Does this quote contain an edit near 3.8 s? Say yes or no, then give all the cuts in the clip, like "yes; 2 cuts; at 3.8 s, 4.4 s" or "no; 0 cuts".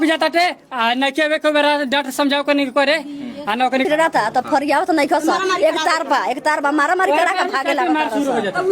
yes; 1 cut; at 3.8 s